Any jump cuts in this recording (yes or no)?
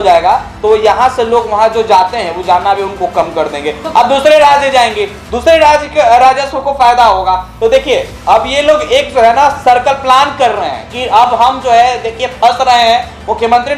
no